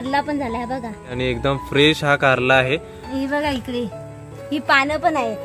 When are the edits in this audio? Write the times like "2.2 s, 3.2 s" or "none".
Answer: 1.2 s, 3.0 s